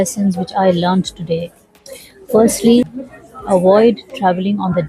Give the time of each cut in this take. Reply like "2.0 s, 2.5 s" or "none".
2.9 s

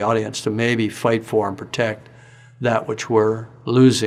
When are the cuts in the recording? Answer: none

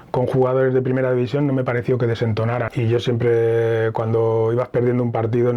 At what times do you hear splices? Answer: 2.7 s

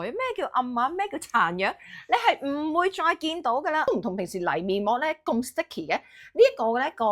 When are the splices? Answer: 3.9 s

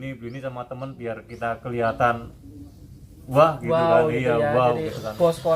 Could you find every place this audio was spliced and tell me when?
none

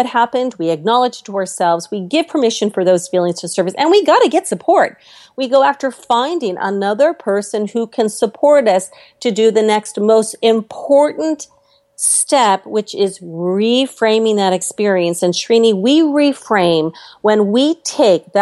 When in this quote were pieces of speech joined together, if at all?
none

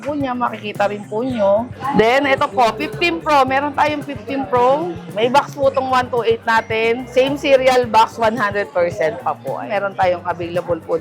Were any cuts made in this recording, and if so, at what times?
1.8 s, 5.0 s, 7.0 s, 9.7 s

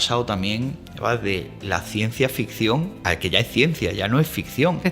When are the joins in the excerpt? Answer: 3.0 s

